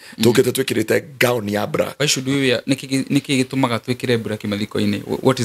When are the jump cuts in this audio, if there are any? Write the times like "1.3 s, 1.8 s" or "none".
1.9 s